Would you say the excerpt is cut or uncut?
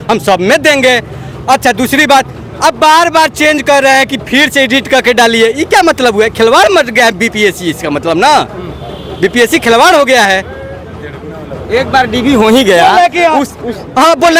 uncut